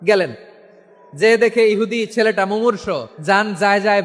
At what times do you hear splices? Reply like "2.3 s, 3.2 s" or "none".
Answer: 3.1 s